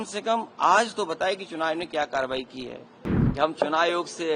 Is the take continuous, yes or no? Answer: no